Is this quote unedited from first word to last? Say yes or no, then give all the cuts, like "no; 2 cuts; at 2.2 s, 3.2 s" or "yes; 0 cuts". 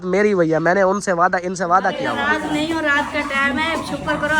no; 1 cut; at 2.1 s